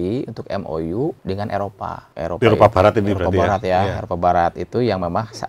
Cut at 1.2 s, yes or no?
yes